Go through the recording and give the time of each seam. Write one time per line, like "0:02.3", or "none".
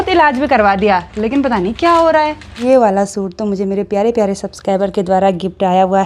0:02.5